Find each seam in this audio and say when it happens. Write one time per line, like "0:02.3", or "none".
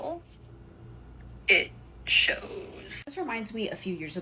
none